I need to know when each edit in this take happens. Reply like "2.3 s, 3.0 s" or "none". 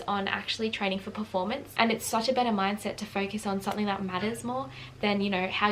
1.7 s